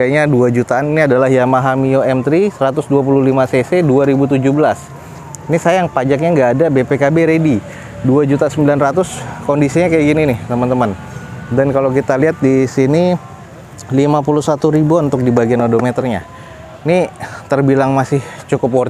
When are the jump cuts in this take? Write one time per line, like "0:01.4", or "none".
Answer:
none